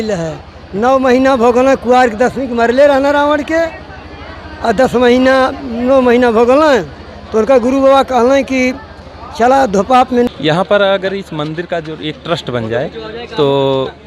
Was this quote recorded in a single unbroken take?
no; 1 cut; at 10.3 s

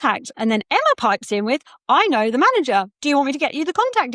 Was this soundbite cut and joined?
no; 0 cuts

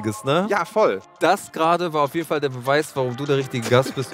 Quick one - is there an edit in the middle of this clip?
yes; 1 cut; at 1.0 s

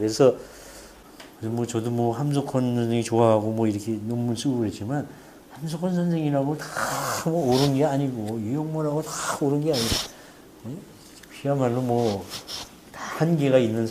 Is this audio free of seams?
no; 1 cut; at 8.9 s

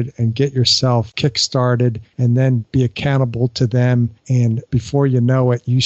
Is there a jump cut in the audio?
yes; 3 cuts; at 1.1 s, 2.4 s, 4.4 s

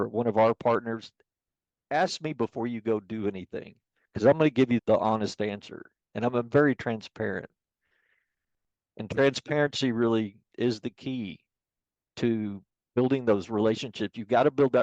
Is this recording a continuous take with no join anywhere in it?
no; 2 cuts; at 4.8 s, 10.4 s

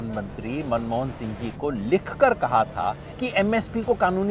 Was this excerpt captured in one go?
no; 1 cut; at 3.1 s

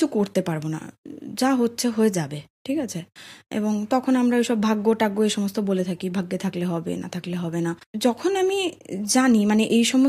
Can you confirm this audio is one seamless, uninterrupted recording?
no; 1 cut; at 7.9 s

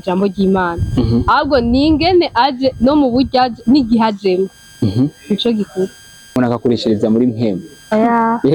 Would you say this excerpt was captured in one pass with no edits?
no; 1 cut; at 6.4 s

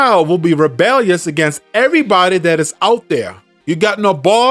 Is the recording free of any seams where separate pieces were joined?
no; 1 cut; at 3.6 s

